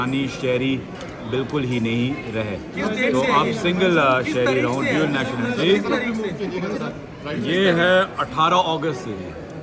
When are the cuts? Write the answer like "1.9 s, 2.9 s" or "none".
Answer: none